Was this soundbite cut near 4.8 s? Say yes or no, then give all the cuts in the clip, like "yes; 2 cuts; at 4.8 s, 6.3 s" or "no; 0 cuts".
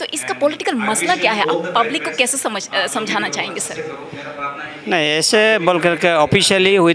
no; 0 cuts